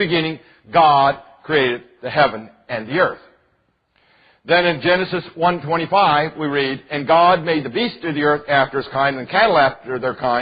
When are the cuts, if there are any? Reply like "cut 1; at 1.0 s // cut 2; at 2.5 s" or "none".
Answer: cut 1; at 9.0 s